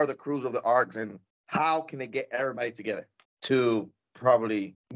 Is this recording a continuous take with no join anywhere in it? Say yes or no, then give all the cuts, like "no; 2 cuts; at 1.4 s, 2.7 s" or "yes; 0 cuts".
yes; 0 cuts